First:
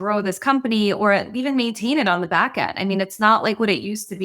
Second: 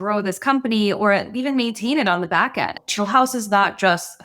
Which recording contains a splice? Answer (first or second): second